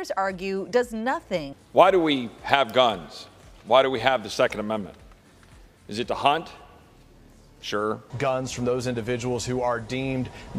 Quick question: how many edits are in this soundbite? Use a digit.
2